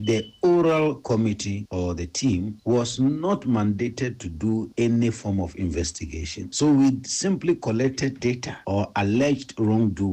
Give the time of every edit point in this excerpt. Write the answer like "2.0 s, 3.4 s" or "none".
8.2 s